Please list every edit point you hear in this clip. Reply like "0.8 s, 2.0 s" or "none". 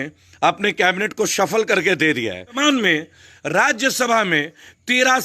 2.6 s